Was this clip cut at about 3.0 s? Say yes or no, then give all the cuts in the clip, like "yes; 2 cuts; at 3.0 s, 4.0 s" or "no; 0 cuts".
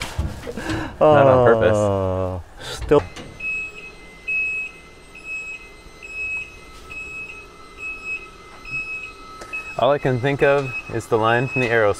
yes; 1 cut; at 3.0 s